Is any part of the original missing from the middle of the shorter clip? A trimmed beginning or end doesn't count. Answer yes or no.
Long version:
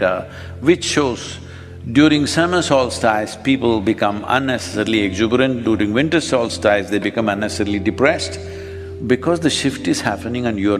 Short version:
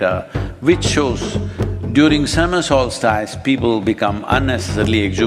no